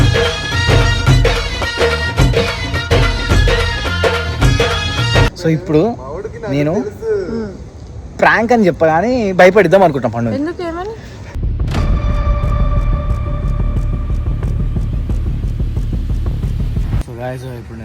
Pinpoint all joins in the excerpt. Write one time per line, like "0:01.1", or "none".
0:05.3
0:17.1